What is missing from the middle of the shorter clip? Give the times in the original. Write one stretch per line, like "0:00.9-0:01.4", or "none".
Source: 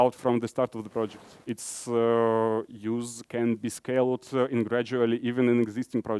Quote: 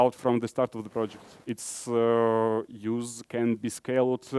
none

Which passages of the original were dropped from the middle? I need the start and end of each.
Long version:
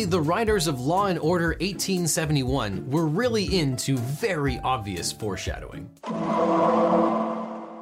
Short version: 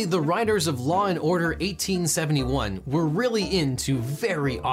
none

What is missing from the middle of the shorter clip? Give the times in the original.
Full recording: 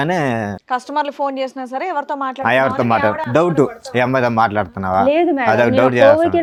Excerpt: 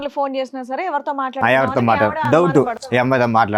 none

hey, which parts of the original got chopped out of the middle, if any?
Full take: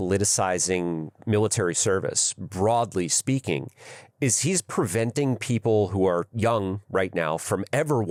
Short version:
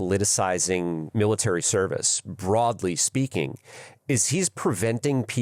0:01.0-0:01.2

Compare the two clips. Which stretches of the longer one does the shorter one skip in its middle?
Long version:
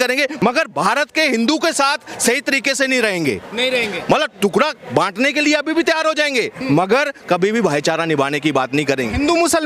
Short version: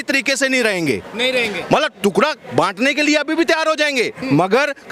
none

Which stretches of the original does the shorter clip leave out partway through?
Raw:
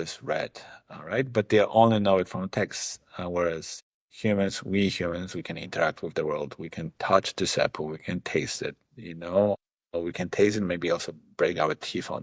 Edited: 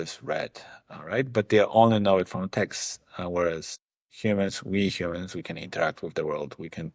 none

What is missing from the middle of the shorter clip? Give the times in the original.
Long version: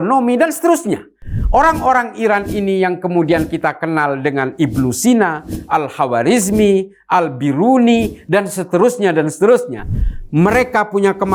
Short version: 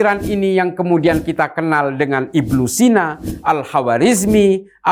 none

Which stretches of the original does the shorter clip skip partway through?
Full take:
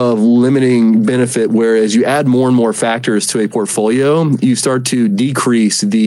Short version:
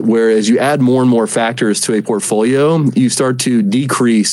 none

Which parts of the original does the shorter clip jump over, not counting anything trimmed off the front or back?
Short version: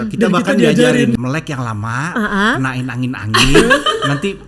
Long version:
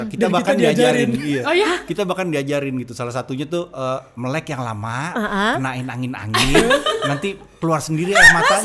0:01.2-0:04.2

